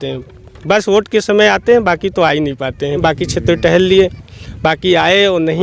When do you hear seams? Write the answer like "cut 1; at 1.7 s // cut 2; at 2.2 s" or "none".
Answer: cut 1; at 3.0 s